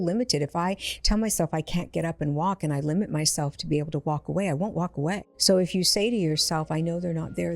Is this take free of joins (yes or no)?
no